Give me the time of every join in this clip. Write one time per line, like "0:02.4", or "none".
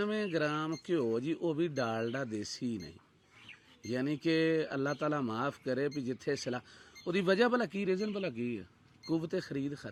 none